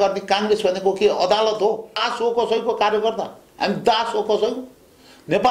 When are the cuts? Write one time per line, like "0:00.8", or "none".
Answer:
0:02.1